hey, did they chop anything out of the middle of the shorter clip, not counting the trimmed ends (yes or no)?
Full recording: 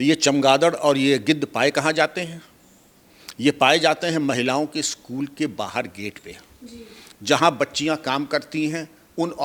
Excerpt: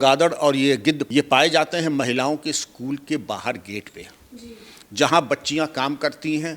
yes